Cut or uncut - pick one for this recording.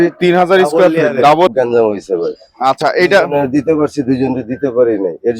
cut